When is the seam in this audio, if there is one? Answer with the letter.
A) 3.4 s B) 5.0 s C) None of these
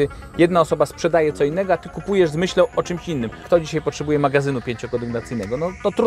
A